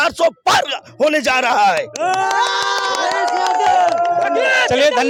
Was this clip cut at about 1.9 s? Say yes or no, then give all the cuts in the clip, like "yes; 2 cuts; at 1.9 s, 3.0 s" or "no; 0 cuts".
no; 0 cuts